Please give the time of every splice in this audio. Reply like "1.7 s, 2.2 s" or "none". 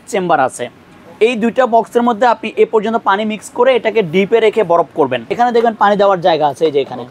5.2 s